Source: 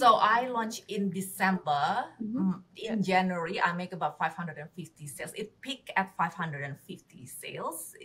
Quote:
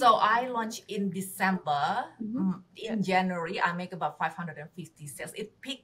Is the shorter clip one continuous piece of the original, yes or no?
yes